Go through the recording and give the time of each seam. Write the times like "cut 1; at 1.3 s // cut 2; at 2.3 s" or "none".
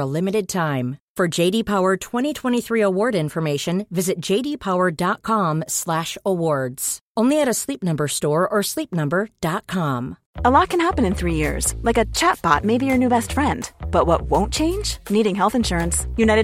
cut 1; at 10.2 s